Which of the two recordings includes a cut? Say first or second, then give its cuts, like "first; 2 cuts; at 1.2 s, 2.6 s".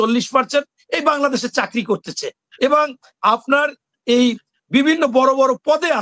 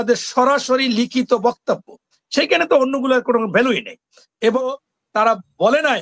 second; 1 cut; at 4.6 s